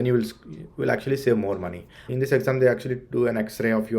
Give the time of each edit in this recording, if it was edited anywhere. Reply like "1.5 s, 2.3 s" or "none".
2.1 s